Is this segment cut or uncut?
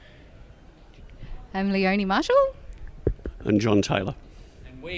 uncut